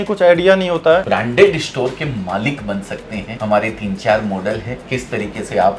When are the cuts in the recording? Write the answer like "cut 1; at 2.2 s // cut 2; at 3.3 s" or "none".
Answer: cut 1; at 1.1 s // cut 2; at 4.8 s